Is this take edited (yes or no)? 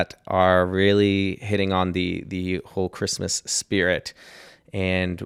no